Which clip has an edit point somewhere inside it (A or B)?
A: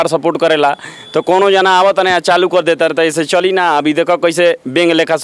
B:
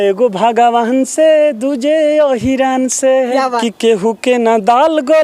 B